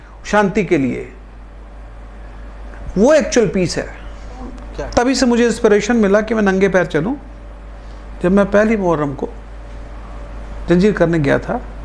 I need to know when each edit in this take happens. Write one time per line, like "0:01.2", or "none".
0:04.6